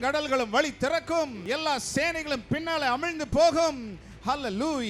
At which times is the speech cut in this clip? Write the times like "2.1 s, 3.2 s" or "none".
1.4 s